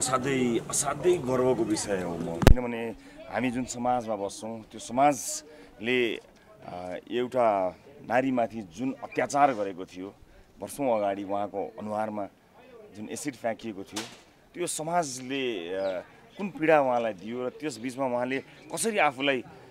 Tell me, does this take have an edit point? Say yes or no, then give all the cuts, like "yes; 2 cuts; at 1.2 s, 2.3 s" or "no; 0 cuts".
no; 0 cuts